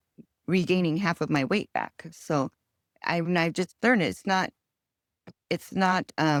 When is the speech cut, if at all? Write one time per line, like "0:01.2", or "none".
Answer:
none